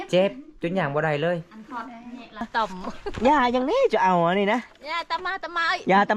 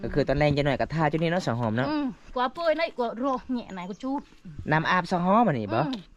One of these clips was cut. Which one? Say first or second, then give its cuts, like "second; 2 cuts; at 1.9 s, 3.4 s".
first; 1 cut; at 2.5 s